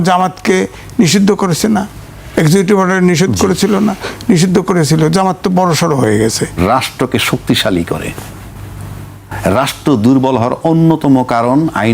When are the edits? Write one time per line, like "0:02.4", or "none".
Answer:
0:06.5